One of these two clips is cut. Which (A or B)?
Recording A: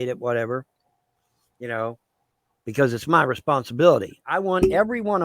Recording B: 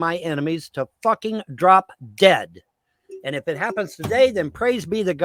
A